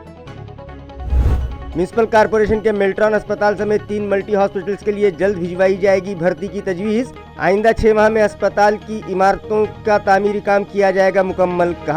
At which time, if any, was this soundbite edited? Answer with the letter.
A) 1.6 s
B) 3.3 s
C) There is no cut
A